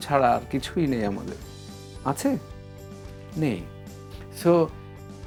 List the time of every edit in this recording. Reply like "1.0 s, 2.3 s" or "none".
none